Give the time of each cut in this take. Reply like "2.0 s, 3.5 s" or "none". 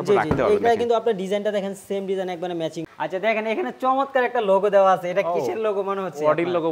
2.9 s